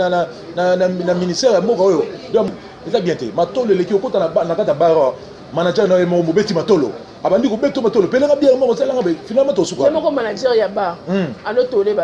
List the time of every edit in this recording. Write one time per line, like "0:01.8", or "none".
0:02.5